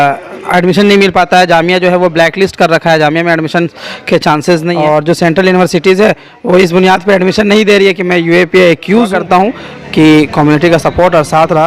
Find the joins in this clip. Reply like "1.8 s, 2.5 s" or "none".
4.7 s, 9.1 s